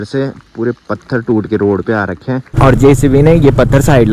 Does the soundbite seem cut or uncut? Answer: cut